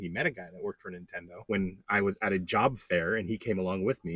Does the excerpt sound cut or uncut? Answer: cut